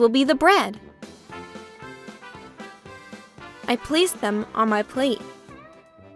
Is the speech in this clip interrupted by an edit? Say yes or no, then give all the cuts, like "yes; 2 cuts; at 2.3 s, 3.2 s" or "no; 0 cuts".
yes; 3 cuts; at 0.8 s, 3.7 s, 5.2 s